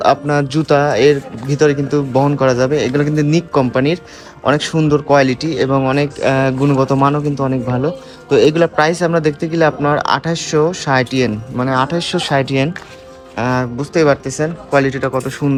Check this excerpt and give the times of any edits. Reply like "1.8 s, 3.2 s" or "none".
none